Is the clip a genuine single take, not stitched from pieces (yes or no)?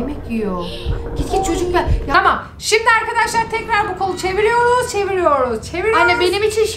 no